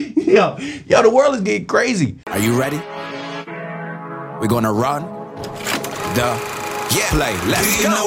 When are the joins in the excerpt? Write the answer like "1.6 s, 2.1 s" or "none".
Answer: 2.2 s